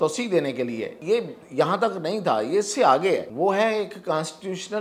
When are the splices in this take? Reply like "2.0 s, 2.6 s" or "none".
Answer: 1.0 s, 3.3 s